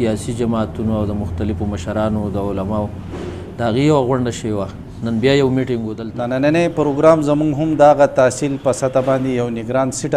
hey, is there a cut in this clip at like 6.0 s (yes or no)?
yes